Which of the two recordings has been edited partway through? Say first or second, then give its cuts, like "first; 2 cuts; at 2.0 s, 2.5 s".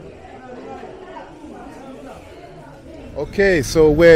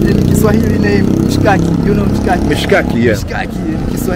first; 1 cut; at 3.1 s